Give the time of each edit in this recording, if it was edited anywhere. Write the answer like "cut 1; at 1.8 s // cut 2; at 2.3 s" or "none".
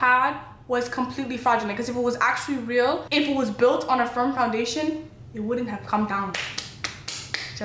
none